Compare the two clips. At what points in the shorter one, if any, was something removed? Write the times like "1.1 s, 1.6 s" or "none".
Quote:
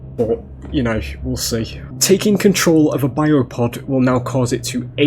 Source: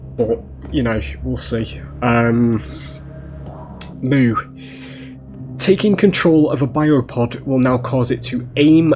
1.8 s